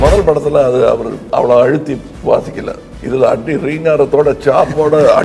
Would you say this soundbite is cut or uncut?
cut